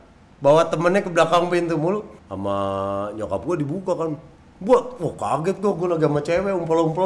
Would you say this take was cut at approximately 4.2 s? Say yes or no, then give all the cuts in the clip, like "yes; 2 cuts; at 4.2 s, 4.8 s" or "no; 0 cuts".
no; 1 cut; at 2.2 s